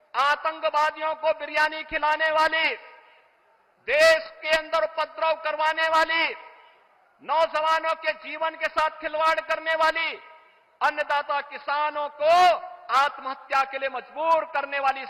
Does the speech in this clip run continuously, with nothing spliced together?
yes; 0 cuts

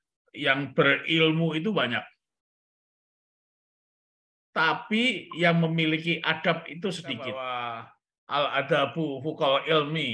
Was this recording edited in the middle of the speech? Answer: yes; 1 cut; at 7.5 s

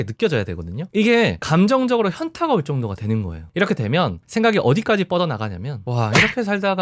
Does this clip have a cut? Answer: no; 0 cuts

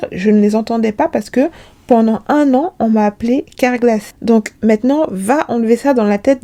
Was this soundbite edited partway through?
no; 0 cuts

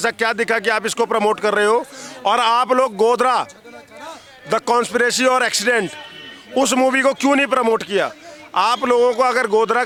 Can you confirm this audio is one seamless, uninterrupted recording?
yes; 0 cuts

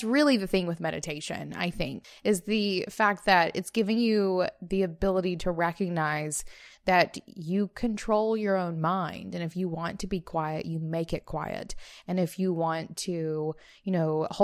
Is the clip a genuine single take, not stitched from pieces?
no; 1 cut; at 2.1 s

